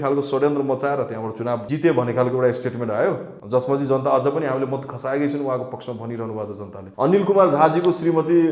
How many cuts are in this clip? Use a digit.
3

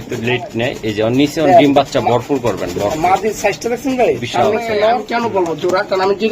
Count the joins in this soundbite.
1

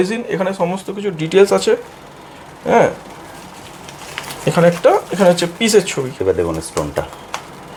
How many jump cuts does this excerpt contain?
0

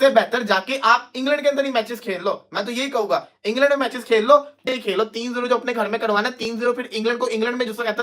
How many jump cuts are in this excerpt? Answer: 1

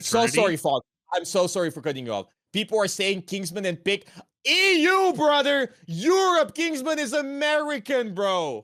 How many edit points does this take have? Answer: 0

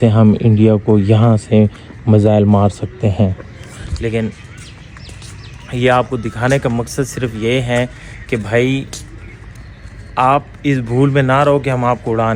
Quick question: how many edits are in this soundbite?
0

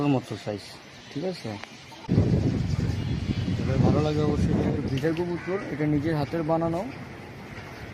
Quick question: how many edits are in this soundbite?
2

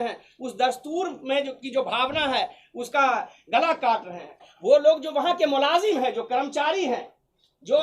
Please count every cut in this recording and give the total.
1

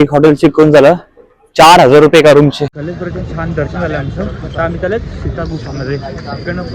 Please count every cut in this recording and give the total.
1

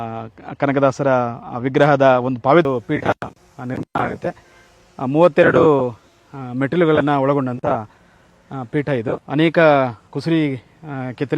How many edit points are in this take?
1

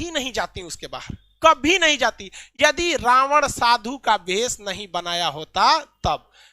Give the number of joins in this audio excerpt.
0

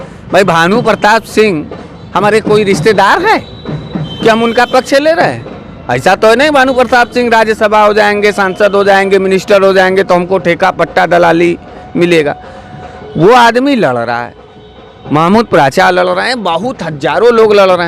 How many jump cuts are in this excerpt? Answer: 0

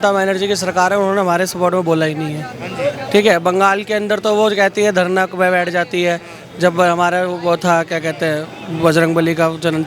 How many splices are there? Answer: 0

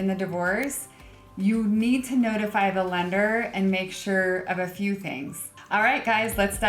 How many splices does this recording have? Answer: 1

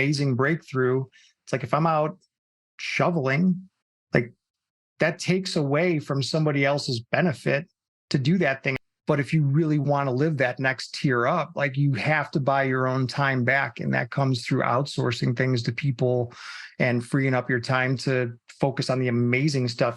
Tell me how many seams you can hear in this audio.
1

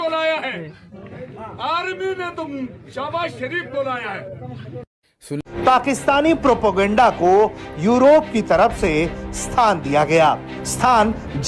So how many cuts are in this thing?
1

